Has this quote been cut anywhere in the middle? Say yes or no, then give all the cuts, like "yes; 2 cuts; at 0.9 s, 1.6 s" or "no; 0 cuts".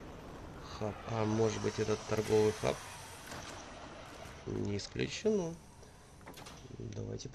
no; 0 cuts